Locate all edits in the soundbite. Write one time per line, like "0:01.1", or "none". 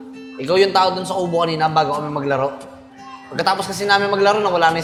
none